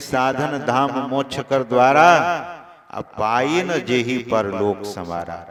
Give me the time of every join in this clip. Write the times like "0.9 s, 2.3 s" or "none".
none